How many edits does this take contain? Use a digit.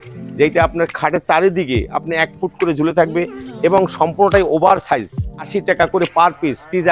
1